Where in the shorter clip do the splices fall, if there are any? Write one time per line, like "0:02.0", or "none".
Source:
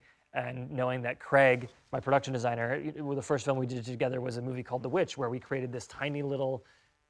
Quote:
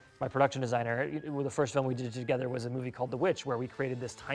none